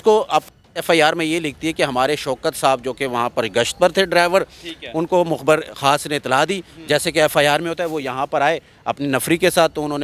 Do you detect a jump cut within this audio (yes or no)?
no